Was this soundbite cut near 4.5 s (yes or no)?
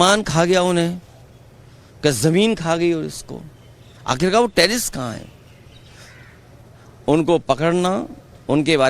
no